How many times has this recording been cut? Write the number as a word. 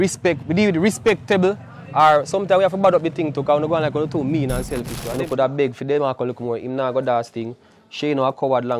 one